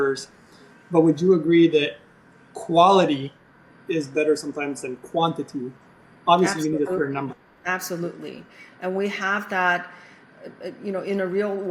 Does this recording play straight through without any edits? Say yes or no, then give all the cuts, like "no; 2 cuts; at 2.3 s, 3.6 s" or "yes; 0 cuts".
yes; 0 cuts